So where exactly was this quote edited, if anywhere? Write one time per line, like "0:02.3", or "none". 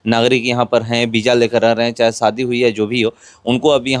none